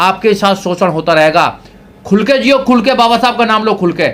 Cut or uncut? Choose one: uncut